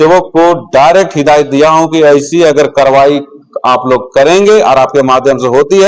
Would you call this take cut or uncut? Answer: uncut